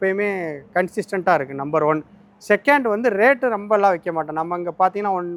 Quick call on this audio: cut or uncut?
uncut